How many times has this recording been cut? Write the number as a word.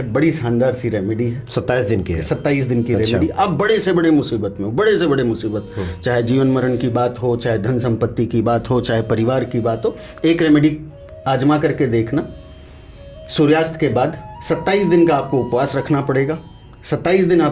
zero